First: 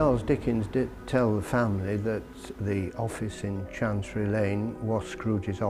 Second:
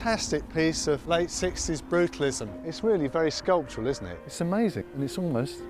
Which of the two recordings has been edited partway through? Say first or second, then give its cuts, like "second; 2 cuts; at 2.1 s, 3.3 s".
second; 2 cuts; at 1.0 s, 4.3 s